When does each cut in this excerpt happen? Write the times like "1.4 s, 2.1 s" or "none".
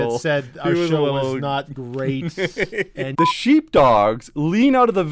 3.1 s